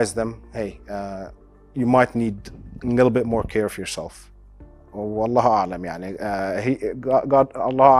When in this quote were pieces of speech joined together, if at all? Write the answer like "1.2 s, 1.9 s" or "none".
none